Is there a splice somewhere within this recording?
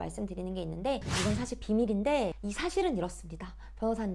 yes; 1 cut; at 1.1 s

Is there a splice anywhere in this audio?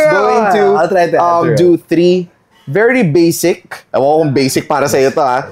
no; 0 cuts

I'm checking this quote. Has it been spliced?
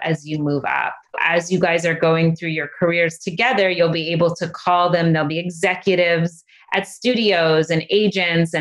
yes; 1 cut; at 1.2 s

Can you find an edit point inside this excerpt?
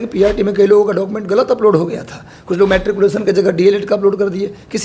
no; 0 cuts

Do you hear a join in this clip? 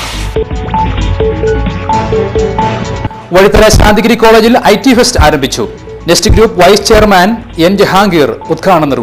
no; 0 cuts

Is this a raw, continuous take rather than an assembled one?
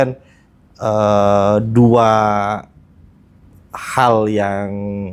yes; 0 cuts

